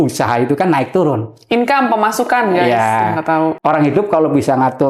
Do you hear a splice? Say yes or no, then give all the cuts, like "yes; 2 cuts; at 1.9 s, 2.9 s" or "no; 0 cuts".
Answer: yes; 1 cut; at 3.6 s